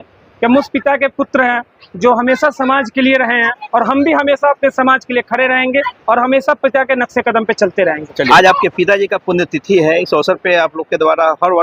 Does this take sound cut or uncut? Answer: uncut